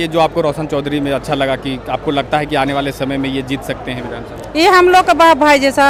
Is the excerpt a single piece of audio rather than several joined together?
yes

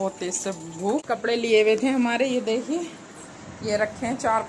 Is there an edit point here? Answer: yes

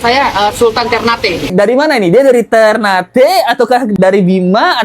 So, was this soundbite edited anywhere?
yes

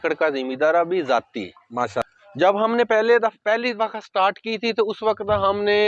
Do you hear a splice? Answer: yes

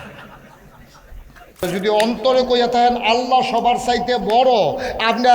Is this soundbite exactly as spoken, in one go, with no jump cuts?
no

